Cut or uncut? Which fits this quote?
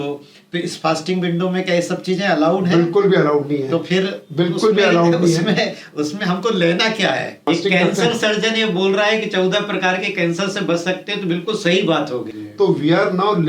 cut